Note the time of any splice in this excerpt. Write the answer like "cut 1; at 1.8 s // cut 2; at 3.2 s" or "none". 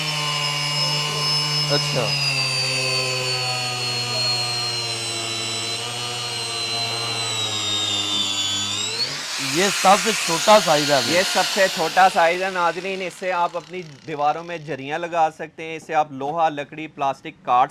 none